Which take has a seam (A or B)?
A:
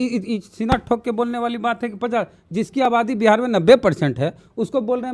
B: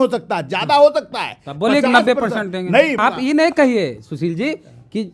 B